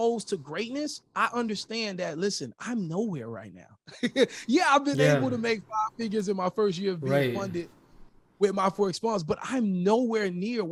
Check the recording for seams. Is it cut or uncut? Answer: uncut